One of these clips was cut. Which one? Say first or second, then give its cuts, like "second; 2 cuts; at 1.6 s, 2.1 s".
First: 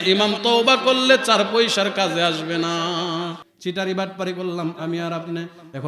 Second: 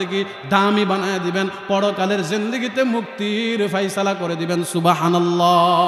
first; 1 cut; at 3.5 s